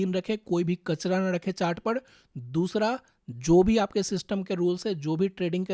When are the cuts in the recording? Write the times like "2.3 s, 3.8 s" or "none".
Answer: none